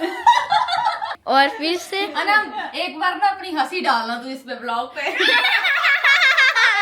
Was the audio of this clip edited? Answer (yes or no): yes